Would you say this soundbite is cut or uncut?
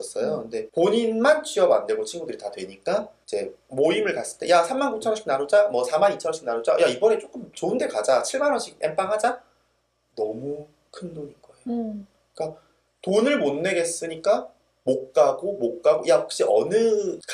cut